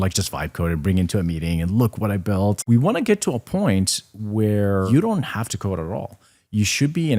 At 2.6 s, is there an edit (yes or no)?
yes